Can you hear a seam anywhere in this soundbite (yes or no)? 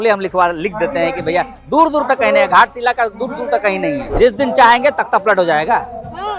yes